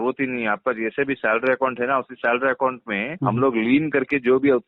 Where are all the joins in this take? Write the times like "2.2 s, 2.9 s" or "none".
3.1 s